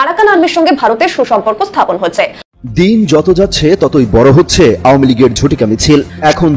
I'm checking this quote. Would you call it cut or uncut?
cut